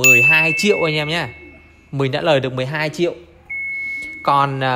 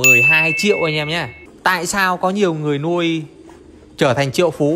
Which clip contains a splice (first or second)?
second